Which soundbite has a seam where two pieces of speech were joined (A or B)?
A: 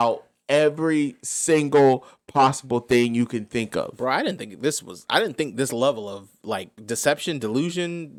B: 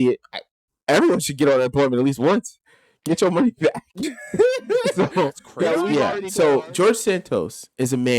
B